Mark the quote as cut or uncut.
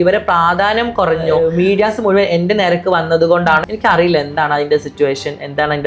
cut